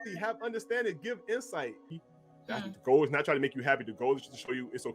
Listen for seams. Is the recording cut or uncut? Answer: cut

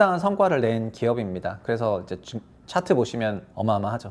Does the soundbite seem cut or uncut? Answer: uncut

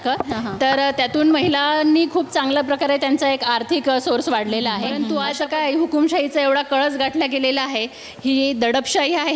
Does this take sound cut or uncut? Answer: cut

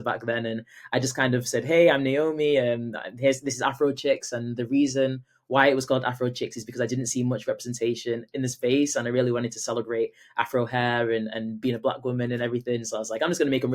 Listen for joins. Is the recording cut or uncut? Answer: uncut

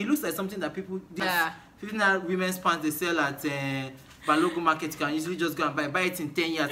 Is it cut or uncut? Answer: cut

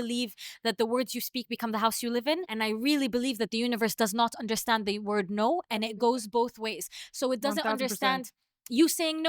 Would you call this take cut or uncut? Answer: cut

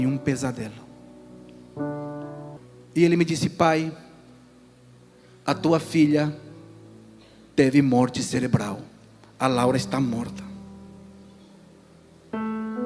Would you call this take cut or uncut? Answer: cut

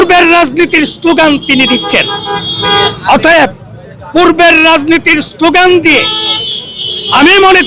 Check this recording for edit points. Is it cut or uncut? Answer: uncut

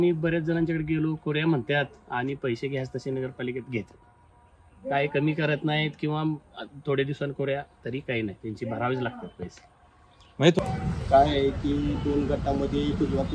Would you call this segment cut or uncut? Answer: cut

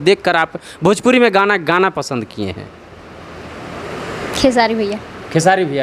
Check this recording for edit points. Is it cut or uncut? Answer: uncut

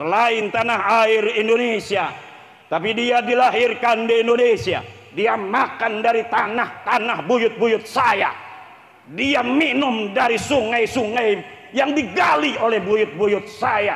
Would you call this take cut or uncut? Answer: uncut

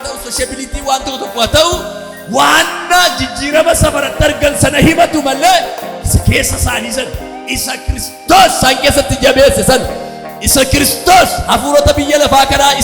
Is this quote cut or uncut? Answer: uncut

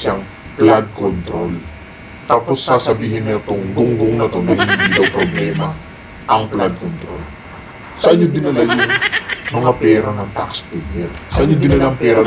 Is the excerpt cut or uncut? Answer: uncut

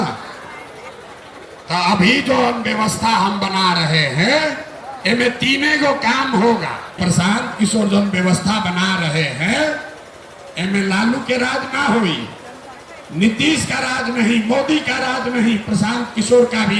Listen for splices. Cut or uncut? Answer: cut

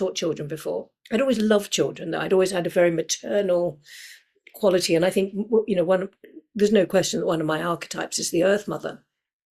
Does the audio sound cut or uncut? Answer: uncut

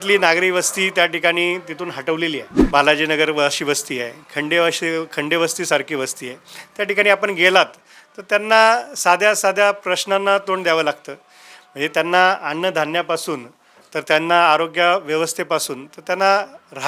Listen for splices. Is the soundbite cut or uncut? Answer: cut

